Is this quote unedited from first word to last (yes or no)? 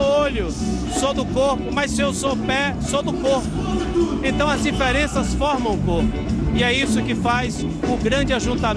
yes